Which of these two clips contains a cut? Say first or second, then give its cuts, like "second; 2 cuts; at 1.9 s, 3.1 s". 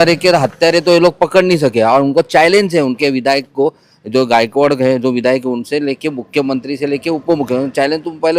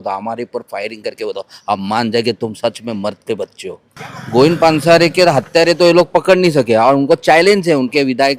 second; 1 cut; at 4.0 s